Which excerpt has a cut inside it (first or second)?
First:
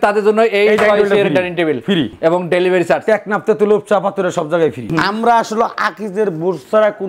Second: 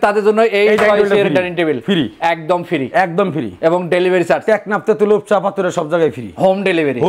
first